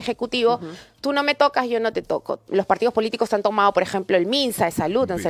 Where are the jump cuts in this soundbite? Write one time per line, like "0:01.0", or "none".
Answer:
0:02.4